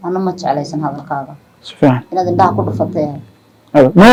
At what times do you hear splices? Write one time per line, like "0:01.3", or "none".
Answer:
none